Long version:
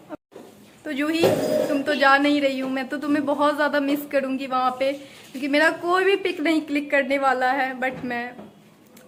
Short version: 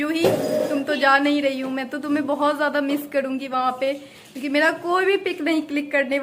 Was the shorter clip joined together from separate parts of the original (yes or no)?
no